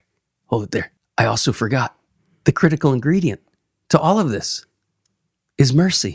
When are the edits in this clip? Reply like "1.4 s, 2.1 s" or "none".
1.0 s

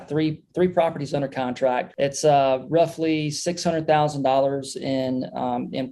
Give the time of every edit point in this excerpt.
1.9 s

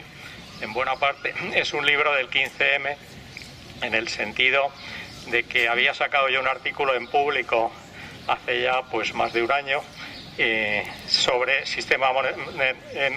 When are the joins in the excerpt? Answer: 3.2 s

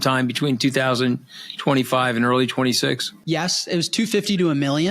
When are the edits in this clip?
3.1 s

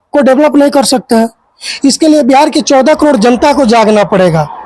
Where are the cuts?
none

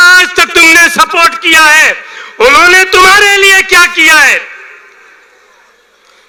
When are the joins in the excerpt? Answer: none

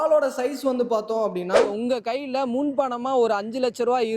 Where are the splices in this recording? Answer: 1.8 s

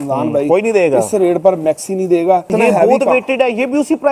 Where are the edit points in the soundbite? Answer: 2.5 s

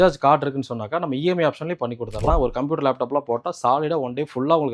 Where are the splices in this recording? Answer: 2.3 s

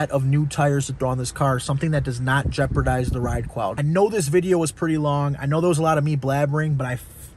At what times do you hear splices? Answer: 3.8 s

